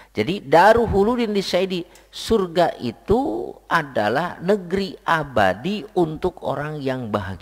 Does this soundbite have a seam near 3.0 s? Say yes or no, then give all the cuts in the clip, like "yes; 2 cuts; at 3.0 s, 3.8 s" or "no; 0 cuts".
no; 0 cuts